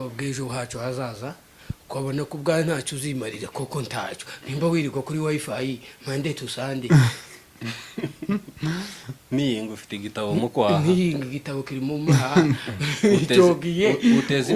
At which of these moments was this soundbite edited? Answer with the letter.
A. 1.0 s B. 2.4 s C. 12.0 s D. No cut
D